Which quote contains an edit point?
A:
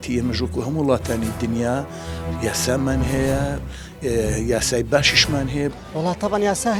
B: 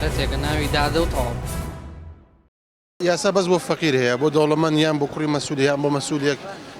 B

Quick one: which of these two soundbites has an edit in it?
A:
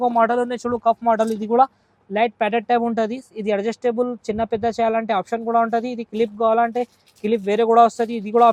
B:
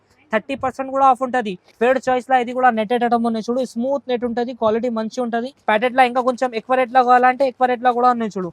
B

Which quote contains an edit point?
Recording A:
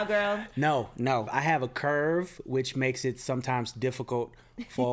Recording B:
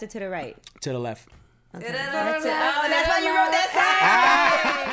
A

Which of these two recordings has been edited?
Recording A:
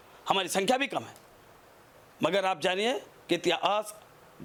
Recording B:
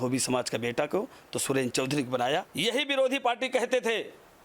B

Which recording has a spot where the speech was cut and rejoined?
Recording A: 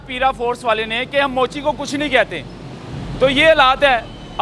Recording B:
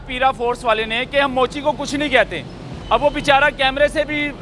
B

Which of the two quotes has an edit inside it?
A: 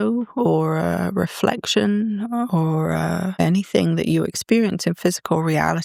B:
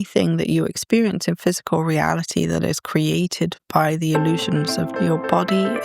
B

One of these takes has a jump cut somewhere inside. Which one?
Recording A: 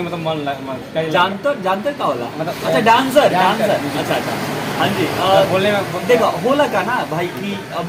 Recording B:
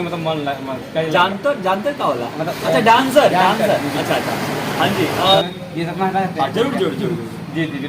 B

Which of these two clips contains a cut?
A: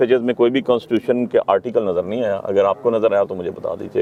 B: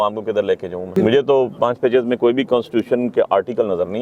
B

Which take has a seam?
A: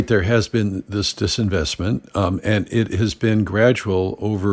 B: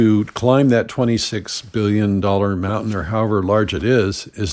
B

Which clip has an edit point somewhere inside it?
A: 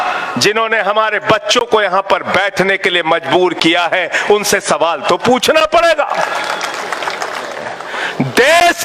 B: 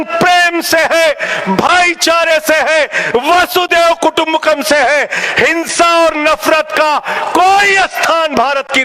A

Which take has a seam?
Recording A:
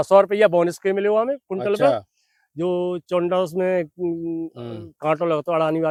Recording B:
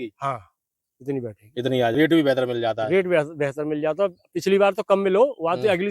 B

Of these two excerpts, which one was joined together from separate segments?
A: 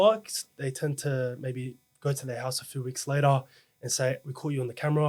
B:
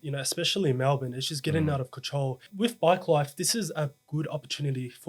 B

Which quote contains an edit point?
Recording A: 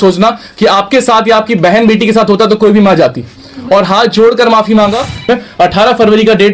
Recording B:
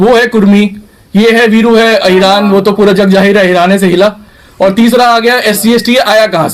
A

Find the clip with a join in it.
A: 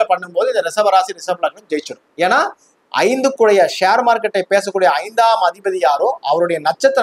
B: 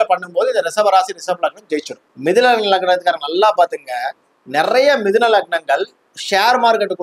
B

